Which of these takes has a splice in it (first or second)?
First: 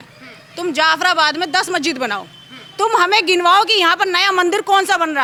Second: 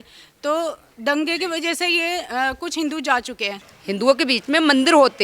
second